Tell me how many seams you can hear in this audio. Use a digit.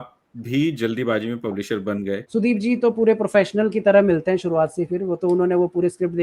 1